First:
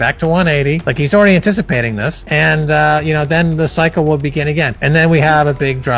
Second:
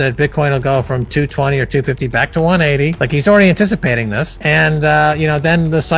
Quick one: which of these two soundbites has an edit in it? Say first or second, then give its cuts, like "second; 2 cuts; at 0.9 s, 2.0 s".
first; 1 cut; at 4.8 s